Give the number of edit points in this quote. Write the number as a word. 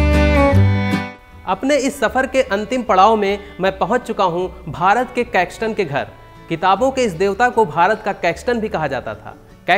one